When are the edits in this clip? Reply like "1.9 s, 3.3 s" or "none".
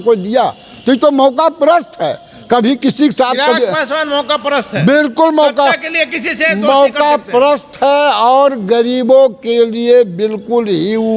none